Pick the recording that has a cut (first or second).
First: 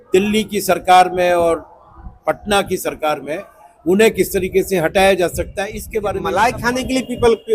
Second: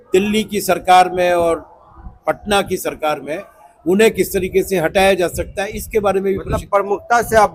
first